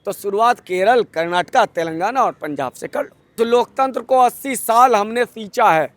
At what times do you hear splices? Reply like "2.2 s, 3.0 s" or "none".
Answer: 3.4 s